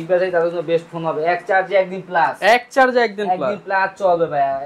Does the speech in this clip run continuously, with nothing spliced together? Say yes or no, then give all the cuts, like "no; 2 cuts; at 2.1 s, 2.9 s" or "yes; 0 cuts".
yes; 0 cuts